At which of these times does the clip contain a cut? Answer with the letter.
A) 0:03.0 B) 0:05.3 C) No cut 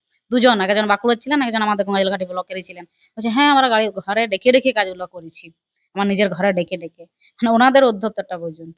C